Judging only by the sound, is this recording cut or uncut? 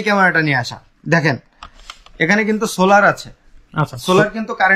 uncut